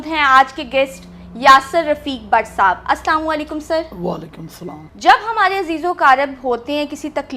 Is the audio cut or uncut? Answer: uncut